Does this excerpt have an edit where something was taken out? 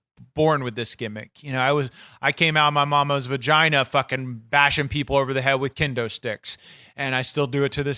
no; 0 cuts

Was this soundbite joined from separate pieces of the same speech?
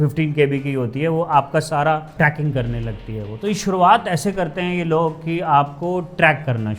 yes; 1 cut; at 2.1 s

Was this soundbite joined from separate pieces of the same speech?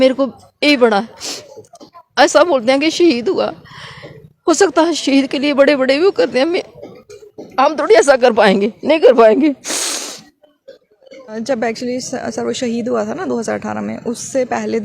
yes; 1 cut; at 11.3 s

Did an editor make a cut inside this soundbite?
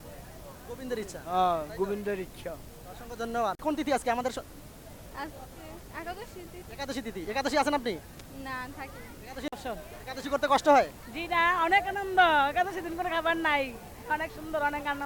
yes; 2 cuts; at 3.6 s, 9.5 s

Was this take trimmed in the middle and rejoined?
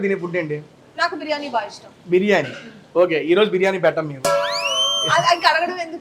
no; 0 cuts

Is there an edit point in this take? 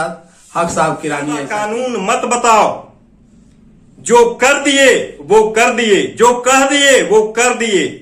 yes; 1 cut; at 1.6 s

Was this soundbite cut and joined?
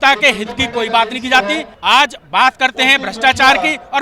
yes; 1 cut; at 1.7 s

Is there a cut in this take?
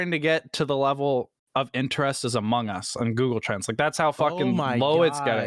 no; 0 cuts

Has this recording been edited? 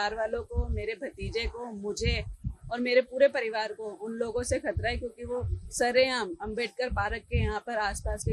no; 0 cuts

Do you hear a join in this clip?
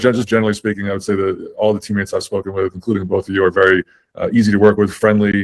no; 0 cuts

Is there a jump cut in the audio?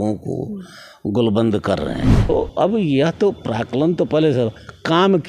yes; 1 cut; at 2.3 s

